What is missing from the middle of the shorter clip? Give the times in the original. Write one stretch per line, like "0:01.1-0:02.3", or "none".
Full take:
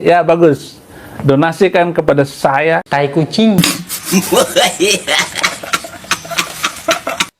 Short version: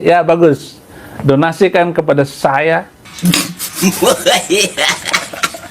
0:03.2-0:03.5